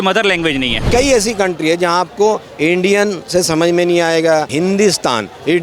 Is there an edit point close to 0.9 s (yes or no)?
yes